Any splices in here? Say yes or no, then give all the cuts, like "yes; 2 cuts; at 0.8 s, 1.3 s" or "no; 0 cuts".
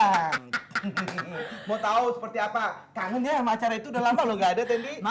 no; 0 cuts